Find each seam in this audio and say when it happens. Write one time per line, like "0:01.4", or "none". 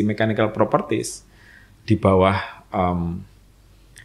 none

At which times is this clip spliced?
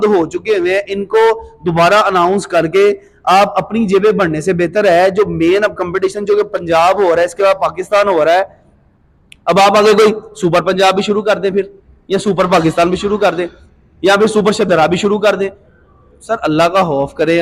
none

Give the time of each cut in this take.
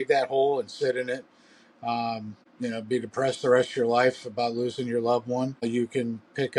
0:02.4
0:05.6

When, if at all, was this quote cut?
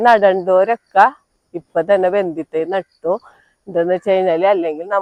none

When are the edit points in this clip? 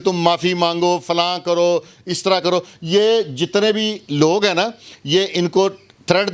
none

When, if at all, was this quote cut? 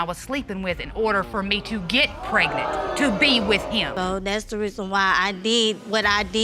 0:03.9

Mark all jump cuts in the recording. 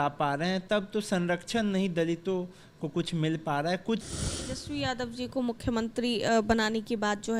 0:04.0

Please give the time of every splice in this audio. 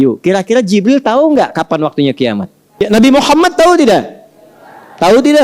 0:02.8

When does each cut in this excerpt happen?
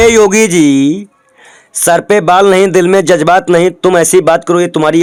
none

